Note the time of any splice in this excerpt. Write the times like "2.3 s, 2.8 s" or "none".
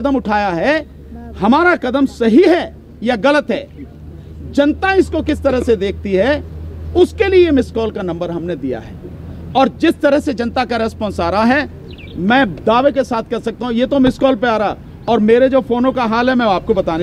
none